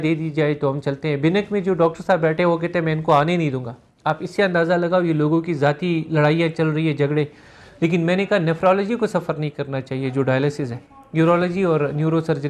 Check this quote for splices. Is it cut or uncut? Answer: uncut